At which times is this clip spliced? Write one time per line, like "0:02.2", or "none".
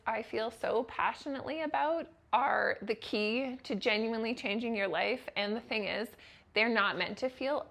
none